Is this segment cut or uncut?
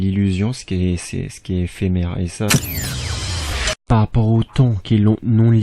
cut